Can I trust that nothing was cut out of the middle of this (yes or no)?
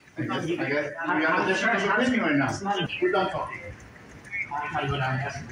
no